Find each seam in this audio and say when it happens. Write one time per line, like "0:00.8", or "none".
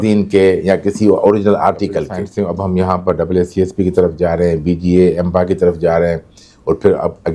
0:02.2